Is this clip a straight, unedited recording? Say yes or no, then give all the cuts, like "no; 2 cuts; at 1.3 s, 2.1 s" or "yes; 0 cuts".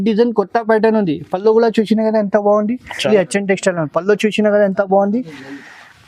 no; 1 cut; at 3.0 s